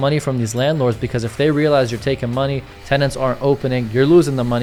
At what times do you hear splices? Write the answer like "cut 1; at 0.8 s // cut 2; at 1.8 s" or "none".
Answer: none